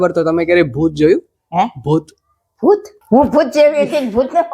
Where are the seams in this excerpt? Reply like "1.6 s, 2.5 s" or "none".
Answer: 2.9 s

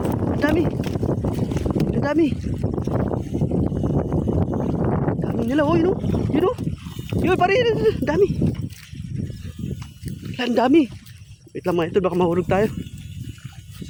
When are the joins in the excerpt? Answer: none

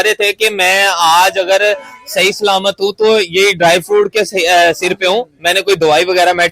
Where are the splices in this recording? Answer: none

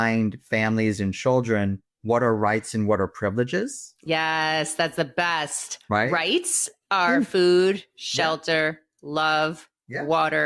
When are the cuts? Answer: none

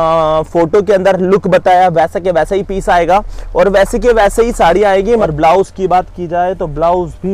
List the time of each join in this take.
5.3 s

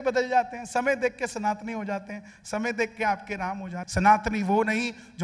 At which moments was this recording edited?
3.7 s

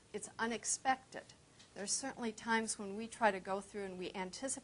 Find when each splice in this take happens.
3.3 s

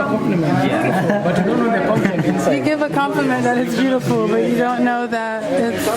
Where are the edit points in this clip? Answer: none

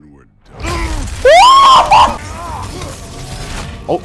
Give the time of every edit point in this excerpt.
2.2 s

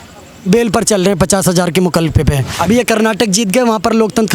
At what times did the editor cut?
2.5 s

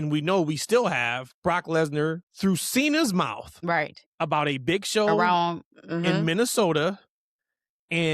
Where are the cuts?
1.3 s, 2.3 s, 3.5 s

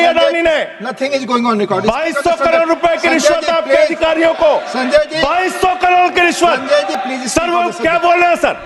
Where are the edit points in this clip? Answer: none

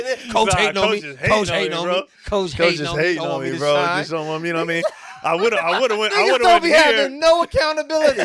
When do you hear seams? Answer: none

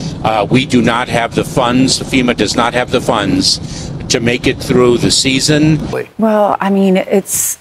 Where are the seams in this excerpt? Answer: 6.1 s

